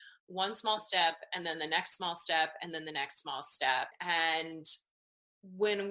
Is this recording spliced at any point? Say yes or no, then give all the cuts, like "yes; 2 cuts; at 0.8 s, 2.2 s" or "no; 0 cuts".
yes; 1 cut; at 4.0 s